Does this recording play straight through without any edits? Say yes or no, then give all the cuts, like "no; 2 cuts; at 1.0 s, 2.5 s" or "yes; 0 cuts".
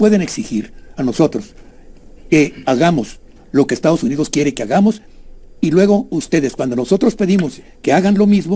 yes; 0 cuts